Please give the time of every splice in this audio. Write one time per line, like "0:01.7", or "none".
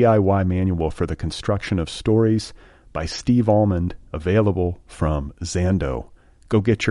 none